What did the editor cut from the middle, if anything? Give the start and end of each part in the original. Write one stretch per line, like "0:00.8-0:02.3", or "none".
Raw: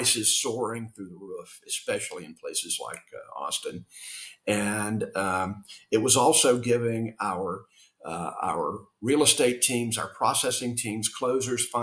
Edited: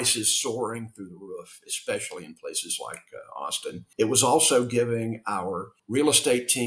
0:03.8-0:05.7
0:07.7-0:08.9